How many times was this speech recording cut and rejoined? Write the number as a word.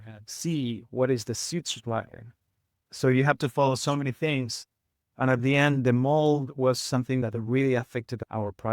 one